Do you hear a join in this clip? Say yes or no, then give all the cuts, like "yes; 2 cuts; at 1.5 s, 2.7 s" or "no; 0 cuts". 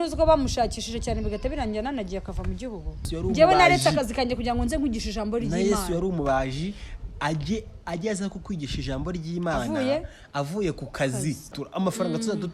yes; 2 cuts; at 3.1 s, 11.6 s